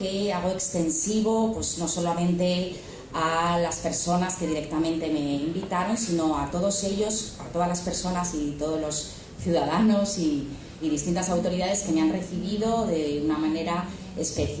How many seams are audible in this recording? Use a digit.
1